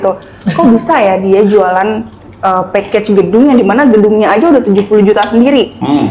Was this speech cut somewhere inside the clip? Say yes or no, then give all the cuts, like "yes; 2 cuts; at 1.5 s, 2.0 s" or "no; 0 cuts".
no; 0 cuts